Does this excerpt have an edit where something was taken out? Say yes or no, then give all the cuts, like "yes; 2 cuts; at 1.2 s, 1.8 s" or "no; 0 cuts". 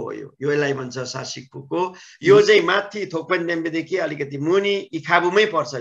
no; 0 cuts